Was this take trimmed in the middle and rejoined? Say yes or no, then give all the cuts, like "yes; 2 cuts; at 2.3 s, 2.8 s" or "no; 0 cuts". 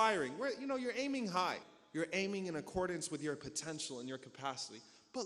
yes; 1 cut; at 1.7 s